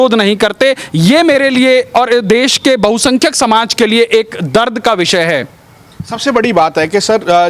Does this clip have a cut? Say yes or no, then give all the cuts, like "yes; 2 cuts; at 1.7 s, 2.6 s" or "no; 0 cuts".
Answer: no; 0 cuts